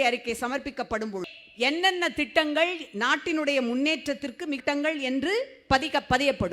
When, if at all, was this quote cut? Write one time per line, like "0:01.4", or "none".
0:01.3
0:04.6

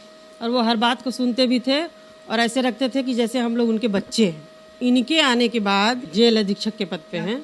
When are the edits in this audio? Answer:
0:04.8
0:06.0

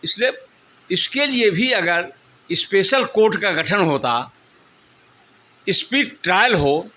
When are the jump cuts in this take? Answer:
none

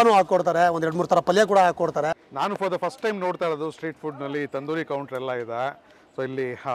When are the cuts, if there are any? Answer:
0:02.1

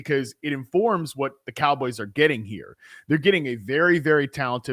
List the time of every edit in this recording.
none

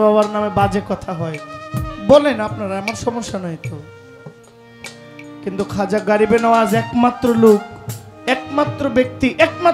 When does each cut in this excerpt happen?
none

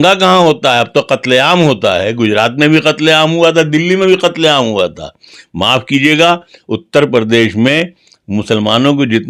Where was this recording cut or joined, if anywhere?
none

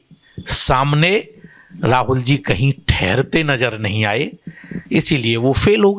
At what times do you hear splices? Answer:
none

